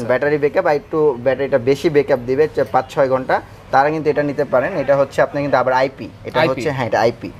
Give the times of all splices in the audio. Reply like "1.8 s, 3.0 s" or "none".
none